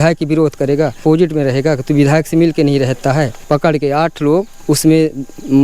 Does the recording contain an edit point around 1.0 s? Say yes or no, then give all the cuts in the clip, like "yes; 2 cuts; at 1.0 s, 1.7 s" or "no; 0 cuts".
yes; 3 cuts; at 1.0 s, 3.4 s, 4.5 s